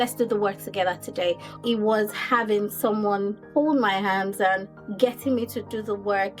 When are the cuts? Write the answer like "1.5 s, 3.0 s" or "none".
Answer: 1.6 s, 3.4 s, 4.8 s